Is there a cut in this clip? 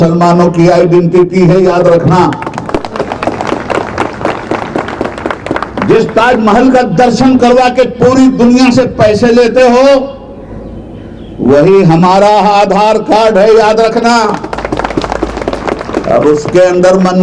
no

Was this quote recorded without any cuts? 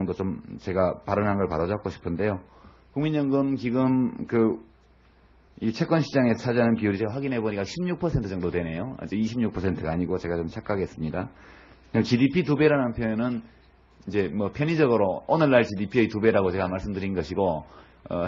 no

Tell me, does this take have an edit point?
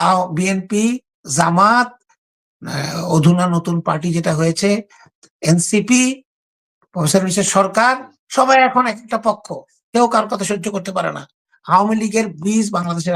yes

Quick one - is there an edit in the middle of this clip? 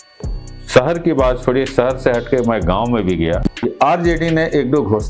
yes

